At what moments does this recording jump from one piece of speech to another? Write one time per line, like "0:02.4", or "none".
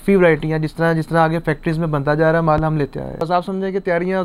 0:03.2